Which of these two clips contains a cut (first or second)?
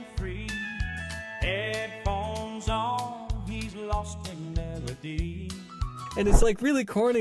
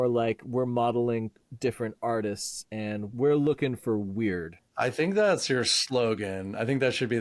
second